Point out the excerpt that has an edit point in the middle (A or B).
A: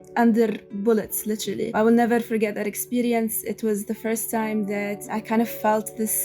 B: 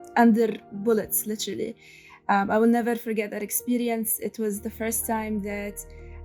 A